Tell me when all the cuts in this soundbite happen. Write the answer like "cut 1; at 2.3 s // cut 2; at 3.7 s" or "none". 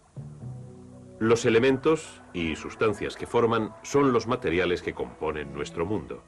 cut 1; at 1.9 s